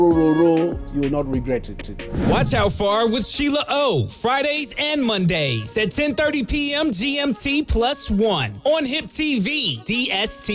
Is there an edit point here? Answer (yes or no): no